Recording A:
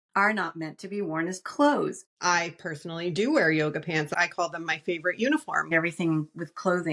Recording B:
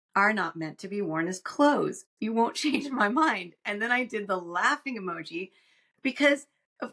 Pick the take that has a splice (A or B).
A